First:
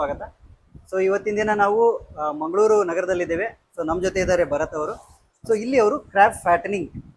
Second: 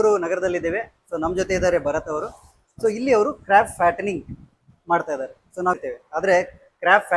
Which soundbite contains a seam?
second; 1 cut; at 5.7 s

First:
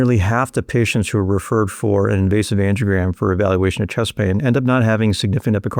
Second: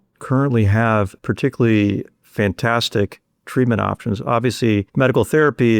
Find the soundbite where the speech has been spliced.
second; 3 cuts; at 1.2 s, 2.2 s, 4.9 s

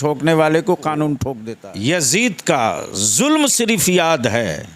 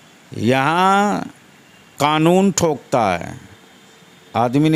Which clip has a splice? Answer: first; 1 cut; at 1.3 s

